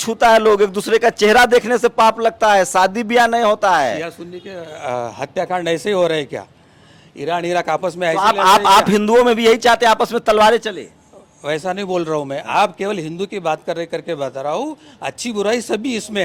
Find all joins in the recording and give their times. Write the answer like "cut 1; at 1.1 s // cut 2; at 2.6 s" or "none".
none

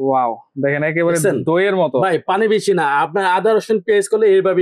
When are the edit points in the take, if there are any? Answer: none

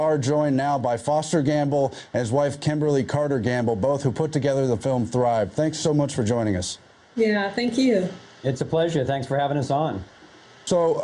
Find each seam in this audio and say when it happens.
cut 1; at 7.3 s

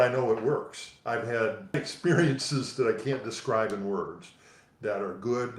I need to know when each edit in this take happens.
cut 1; at 1.7 s

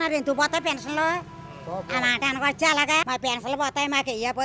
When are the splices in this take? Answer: cut 1; at 3.1 s

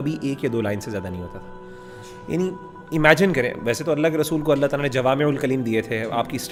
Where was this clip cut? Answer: none

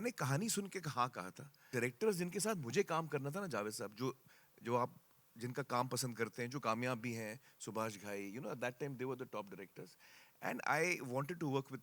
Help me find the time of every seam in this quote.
cut 1; at 1.7 s

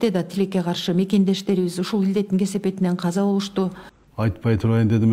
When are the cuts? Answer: cut 1; at 3.9 s

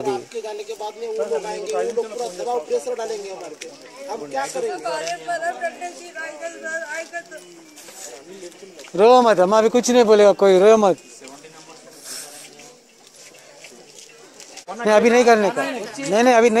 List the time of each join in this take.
cut 1; at 14.6 s

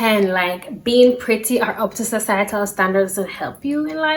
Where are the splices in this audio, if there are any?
none

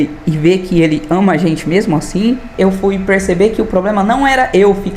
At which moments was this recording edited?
cut 1; at 2.5 s

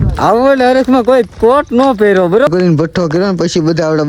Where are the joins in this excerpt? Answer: cut 1; at 2.5 s

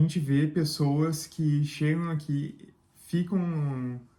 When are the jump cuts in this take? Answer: none

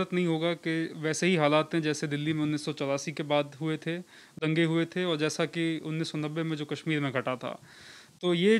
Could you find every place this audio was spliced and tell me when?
cut 1; at 4.4 s

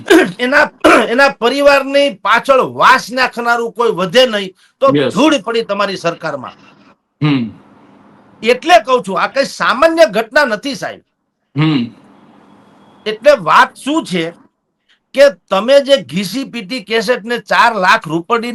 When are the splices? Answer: none

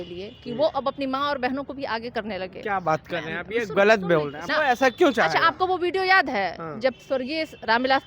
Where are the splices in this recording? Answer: cut 1; at 4.4 s

